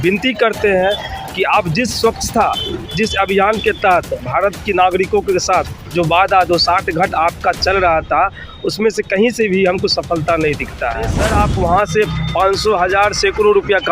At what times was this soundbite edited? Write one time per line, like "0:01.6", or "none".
0:11.2